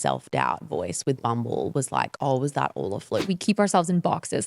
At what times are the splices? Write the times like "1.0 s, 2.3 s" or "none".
3.2 s